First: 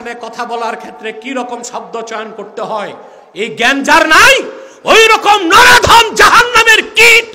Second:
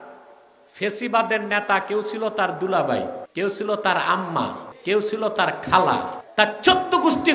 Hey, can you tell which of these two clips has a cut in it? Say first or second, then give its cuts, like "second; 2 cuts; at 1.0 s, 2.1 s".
second; 3 cuts; at 3.2 s, 4.7 s, 6.2 s